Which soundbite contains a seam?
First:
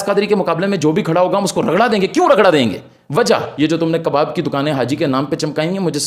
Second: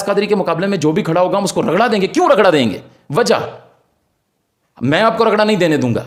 first; 1 cut; at 3.5 s

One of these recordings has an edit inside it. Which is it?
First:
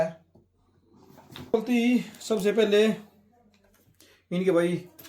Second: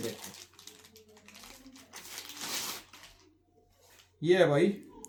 first; 1 cut; at 1.5 s

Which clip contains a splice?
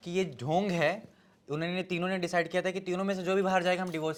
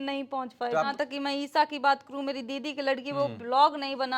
second; 1 cut; at 0.9 s

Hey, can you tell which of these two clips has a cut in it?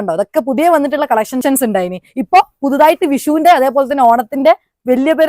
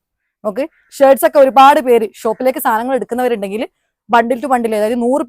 first; 1 cut; at 1.4 s

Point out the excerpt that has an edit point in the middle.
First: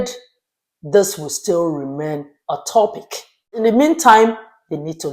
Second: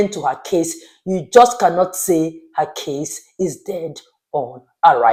first; 1 cut; at 3.6 s

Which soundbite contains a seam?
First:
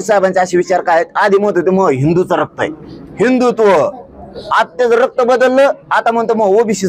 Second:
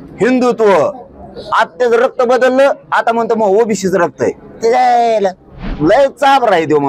second; 1 cut; at 5.7 s

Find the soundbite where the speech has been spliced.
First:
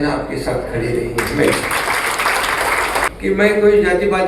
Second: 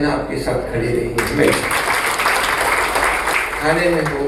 first; 1 cut; at 3.1 s

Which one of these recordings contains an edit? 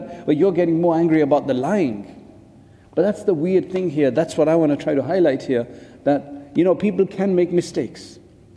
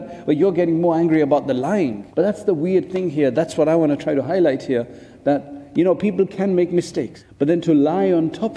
second; 2 cuts; at 2.0 s, 7.2 s

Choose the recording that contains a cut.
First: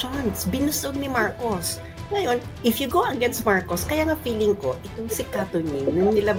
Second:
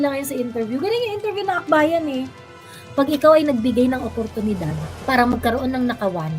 second; 1 cut; at 2.6 s

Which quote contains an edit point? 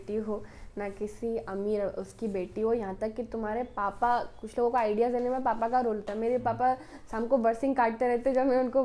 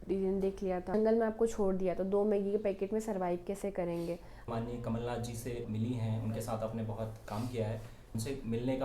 second; 3 cuts; at 0.9 s, 4.4 s, 8.1 s

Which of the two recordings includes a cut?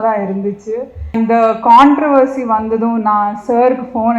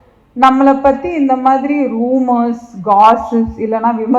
first; 1 cut; at 1.1 s

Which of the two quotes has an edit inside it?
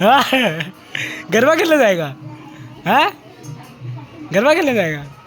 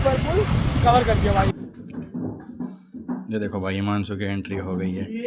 second; 1 cut; at 1.5 s

